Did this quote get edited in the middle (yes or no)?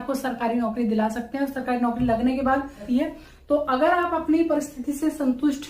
yes